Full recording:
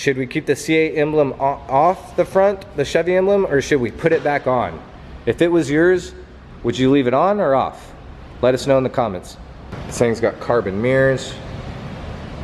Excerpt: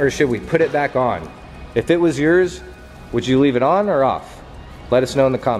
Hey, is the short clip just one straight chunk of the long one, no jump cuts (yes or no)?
yes